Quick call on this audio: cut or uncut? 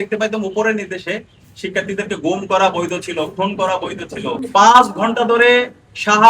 cut